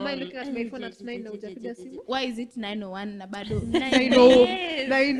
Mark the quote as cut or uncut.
uncut